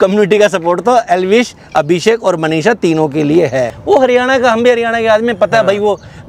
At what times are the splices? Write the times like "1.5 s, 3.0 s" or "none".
3.8 s